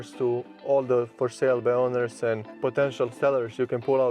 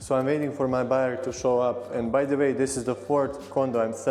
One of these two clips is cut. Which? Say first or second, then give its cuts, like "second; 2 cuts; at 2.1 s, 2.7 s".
first; 1 cut; at 2.5 s